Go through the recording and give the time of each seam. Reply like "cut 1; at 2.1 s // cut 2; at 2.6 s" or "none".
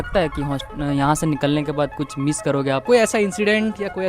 cut 1; at 2.8 s